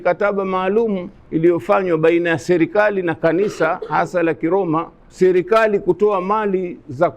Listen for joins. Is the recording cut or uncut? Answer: cut